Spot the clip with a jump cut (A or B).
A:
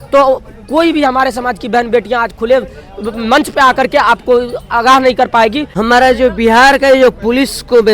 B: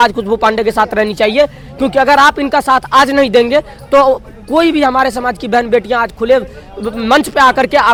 A